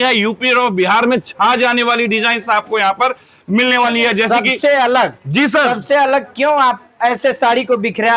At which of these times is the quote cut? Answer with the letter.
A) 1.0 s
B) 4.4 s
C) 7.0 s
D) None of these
D